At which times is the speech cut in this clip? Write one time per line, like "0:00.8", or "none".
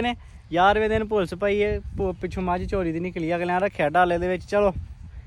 none